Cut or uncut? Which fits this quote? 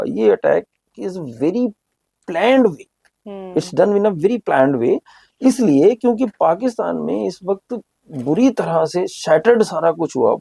uncut